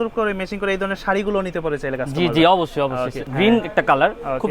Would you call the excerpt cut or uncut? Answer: cut